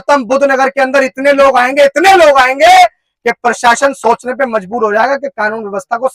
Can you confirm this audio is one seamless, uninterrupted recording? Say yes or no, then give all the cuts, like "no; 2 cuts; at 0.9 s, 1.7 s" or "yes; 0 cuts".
yes; 0 cuts